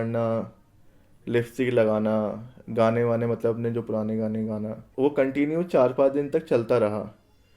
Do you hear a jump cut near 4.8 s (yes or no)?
yes